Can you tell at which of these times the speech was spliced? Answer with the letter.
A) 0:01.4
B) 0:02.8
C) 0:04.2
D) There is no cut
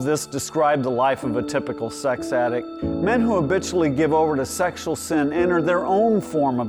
B